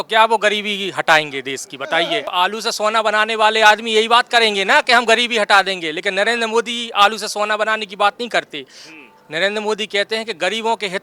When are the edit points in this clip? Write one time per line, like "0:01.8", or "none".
0:02.3